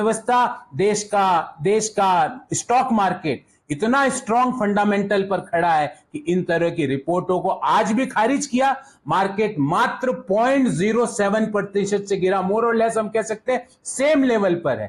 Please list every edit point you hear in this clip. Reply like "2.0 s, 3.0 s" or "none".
none